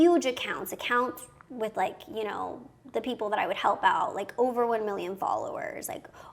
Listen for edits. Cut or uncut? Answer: uncut